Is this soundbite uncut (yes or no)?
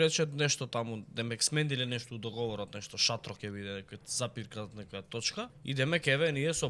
no